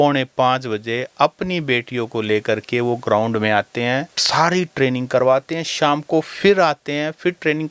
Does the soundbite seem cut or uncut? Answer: uncut